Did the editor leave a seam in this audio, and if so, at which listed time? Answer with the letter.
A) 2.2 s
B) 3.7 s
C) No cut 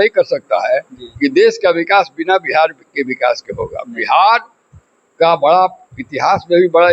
C